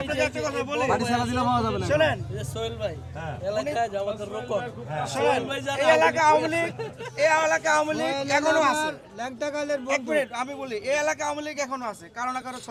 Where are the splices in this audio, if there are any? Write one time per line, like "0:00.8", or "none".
none